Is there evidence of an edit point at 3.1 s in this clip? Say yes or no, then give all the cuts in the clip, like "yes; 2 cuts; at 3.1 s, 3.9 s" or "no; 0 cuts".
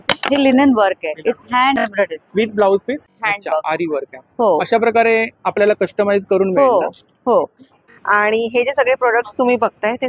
yes; 2 cuts; at 3.1 s, 7.8 s